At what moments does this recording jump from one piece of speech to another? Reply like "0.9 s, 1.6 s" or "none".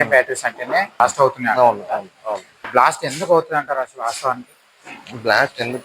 1.0 s, 2.7 s